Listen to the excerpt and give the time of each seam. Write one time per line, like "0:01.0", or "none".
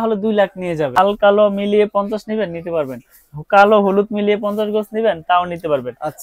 0:01.0